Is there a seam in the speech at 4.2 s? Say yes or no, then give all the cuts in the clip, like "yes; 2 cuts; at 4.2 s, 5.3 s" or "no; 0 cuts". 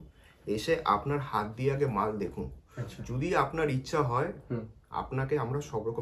no; 0 cuts